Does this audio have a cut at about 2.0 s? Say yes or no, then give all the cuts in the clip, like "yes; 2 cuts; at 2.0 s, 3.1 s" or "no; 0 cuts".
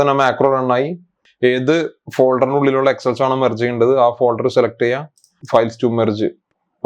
no; 1 cut; at 5.4 s